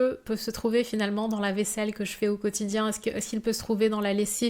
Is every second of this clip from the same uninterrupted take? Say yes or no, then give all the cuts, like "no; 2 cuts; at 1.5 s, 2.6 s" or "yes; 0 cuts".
yes; 0 cuts